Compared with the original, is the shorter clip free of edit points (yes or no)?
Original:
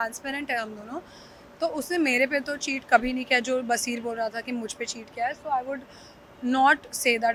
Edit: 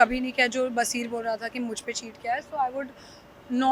yes